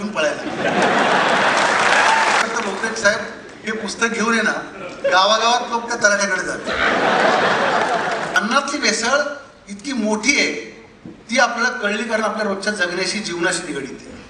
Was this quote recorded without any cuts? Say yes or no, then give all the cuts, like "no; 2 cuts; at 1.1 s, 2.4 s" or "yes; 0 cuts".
no; 2 cuts; at 2.4 s, 8.4 s